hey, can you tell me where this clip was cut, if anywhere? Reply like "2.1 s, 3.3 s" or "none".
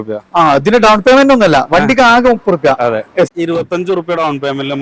3.3 s